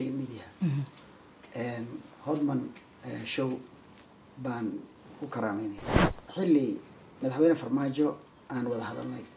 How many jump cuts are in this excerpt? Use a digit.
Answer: 1